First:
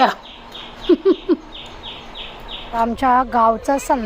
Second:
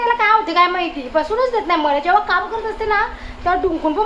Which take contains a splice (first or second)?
first